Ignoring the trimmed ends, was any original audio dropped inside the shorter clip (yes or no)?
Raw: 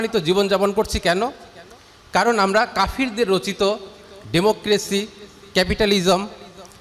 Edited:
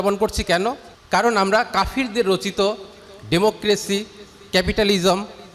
yes